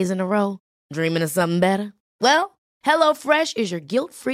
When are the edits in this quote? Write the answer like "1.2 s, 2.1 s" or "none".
none